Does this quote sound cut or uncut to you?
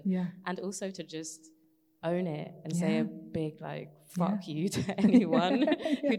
uncut